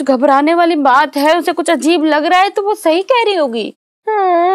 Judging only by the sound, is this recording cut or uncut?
uncut